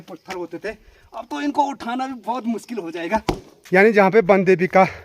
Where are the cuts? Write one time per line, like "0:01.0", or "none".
0:03.6